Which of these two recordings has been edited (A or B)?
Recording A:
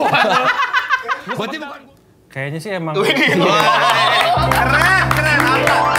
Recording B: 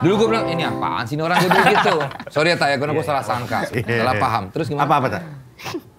A